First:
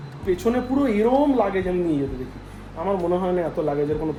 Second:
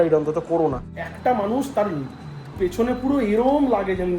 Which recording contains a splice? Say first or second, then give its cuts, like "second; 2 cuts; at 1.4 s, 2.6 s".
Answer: second; 1 cut; at 0.9 s